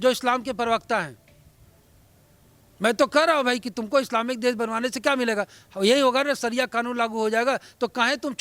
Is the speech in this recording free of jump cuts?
yes; 0 cuts

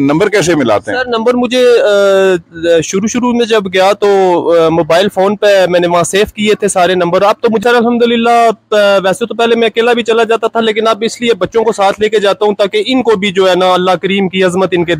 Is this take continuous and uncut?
no; 1 cut; at 7.6 s

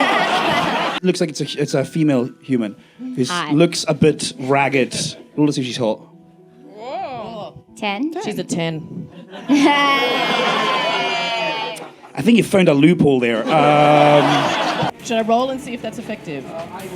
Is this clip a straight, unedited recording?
no; 2 cuts; at 0.9 s, 14.7 s

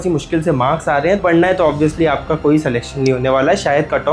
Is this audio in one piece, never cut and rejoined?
no; 1 cut; at 1.2 s

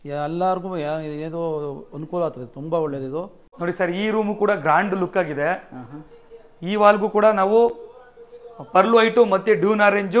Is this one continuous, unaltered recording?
no; 1 cut; at 3.4 s

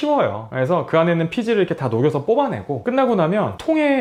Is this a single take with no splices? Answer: yes; 0 cuts

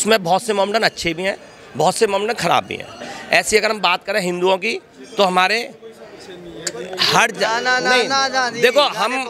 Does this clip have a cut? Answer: no; 0 cuts

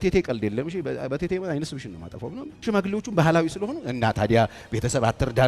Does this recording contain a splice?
yes; 1 cut; at 2.5 s

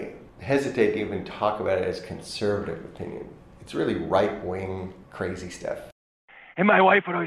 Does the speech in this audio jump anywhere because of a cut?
yes; 1 cut; at 6.0 s

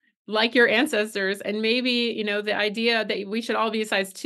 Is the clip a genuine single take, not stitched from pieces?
yes; 0 cuts

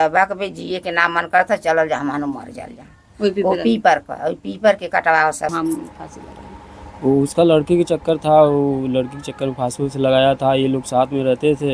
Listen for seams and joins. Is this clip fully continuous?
no; 1 cut; at 5.5 s

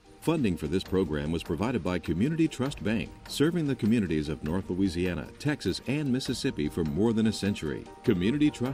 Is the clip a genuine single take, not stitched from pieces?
yes; 0 cuts

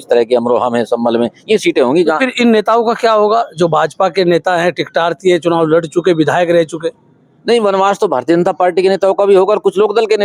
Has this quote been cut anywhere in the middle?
no; 0 cuts

